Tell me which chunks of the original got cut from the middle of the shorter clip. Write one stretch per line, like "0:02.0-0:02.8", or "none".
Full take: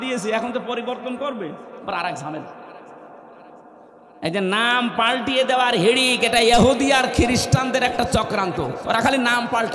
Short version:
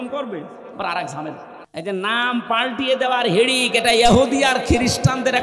0:02.6-0:04.0